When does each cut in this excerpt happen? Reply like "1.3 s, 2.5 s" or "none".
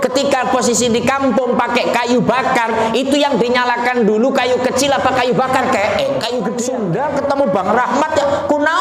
6.7 s